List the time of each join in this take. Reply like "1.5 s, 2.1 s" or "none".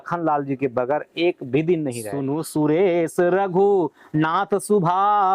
2.1 s